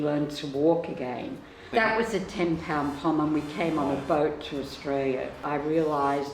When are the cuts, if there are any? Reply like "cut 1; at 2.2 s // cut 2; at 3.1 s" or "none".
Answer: cut 1; at 1.6 s // cut 2; at 5.4 s